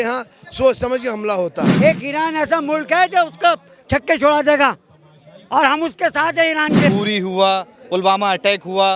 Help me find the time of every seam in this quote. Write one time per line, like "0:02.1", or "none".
0:01.7
0:06.9